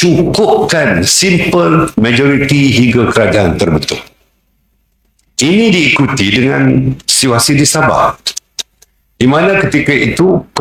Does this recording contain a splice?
no; 0 cuts

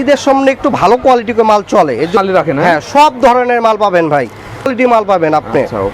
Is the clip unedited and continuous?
no; 2 cuts; at 2.2 s, 4.7 s

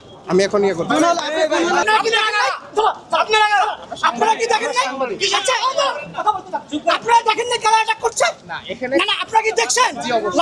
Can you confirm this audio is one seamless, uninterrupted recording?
no; 1 cut; at 1.8 s

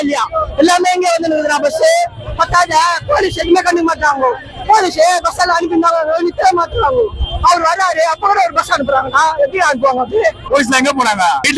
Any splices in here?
no; 0 cuts

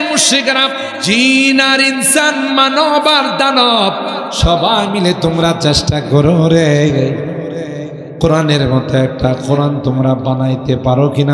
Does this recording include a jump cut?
yes; 1 cut; at 0.9 s

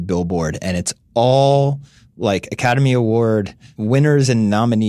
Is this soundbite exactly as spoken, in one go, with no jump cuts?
yes; 0 cuts

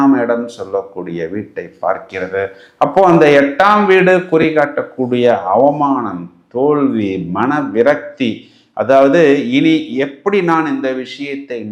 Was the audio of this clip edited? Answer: no; 0 cuts

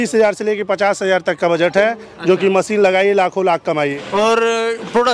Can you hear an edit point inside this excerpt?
yes; 1 cut; at 4.0 s

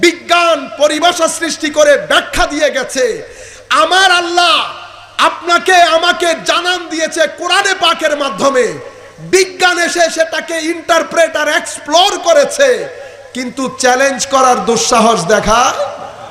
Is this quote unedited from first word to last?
yes; 0 cuts

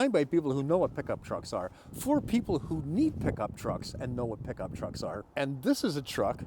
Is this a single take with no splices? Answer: no; 1 cut; at 5.2 s

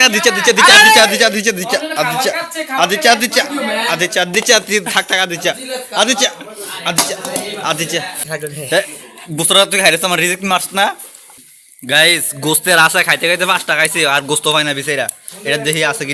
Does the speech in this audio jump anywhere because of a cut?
yes; 2 cuts; at 8.2 s, 11.4 s

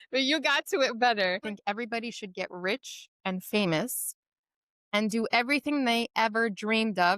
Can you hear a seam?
yes; 1 cut; at 1.5 s

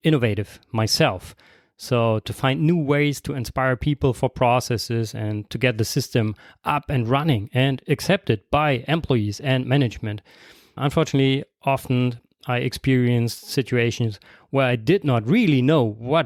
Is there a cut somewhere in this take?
no; 0 cuts

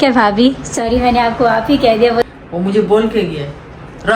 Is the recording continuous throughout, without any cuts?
no; 1 cut; at 2.2 s

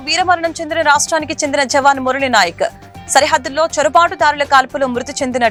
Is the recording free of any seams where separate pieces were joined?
yes; 0 cuts

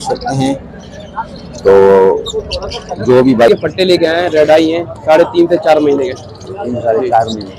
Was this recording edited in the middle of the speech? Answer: yes; 1 cut; at 3.5 s

